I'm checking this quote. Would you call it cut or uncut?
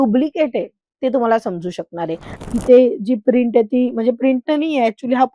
cut